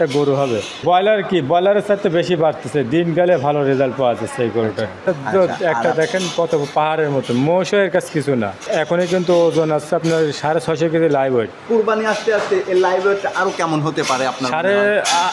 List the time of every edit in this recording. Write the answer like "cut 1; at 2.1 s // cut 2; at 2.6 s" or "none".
cut 1; at 0.8 s // cut 2; at 5.0 s // cut 3; at 8.6 s // cut 4; at 11.6 s